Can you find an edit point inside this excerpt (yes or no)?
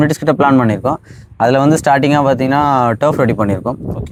no